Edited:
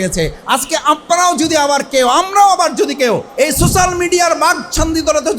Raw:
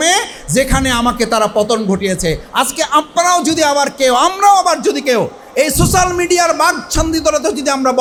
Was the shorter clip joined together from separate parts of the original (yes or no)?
yes